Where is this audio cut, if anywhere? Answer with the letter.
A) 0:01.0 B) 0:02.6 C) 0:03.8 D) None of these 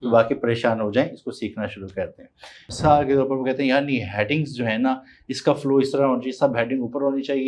B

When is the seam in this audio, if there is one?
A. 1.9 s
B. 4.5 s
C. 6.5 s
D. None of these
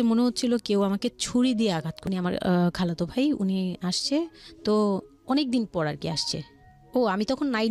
A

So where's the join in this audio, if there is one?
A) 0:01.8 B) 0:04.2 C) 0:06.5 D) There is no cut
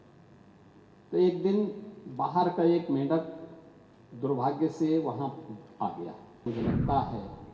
C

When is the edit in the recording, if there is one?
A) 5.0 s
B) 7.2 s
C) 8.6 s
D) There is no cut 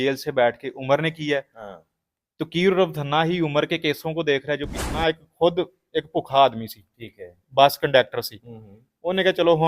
A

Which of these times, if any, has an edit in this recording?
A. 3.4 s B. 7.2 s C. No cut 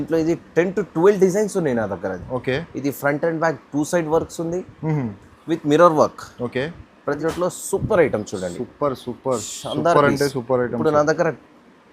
B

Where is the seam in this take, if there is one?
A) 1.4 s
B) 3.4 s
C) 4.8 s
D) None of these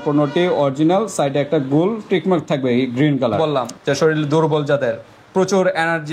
B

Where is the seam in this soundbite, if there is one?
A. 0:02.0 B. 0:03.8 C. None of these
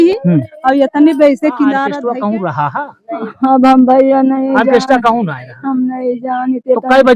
A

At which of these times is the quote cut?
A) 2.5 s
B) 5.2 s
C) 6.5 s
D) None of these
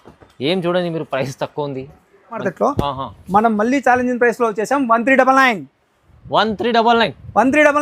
A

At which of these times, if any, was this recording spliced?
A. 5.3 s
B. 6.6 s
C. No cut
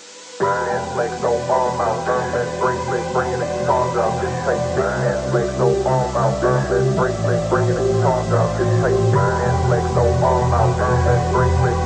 C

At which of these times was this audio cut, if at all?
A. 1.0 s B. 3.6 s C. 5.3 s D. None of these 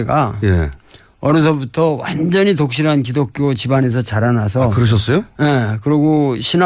C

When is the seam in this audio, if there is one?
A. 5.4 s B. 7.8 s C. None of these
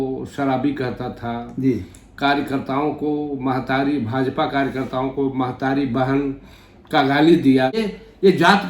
B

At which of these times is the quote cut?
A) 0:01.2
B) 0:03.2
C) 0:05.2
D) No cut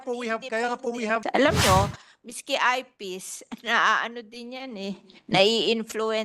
A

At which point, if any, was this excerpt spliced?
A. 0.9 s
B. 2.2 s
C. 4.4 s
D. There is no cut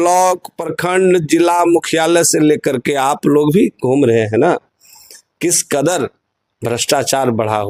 D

